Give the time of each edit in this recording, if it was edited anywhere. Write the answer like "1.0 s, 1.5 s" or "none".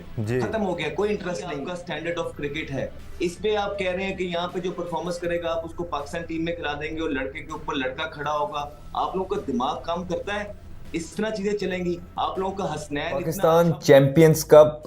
1.7 s, 13.3 s